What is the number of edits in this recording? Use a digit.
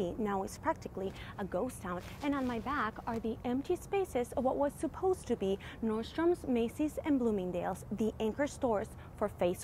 0